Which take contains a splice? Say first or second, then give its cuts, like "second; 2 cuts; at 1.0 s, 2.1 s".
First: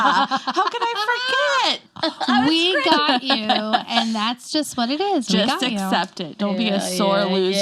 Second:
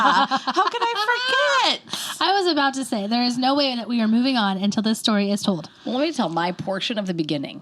first; 1 cut; at 1.9 s